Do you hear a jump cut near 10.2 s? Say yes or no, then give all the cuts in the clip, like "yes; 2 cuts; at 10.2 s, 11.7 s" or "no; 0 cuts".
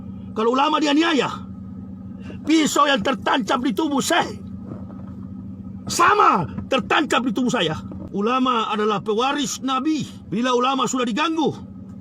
yes; 2 cuts; at 7.9 s, 10.2 s